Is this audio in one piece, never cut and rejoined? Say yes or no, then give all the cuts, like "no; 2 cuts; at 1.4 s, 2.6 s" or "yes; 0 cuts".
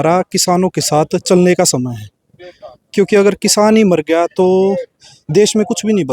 yes; 0 cuts